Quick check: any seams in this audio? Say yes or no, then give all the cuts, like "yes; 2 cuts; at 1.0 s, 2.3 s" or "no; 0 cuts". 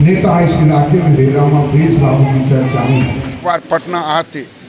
yes; 1 cut; at 3.4 s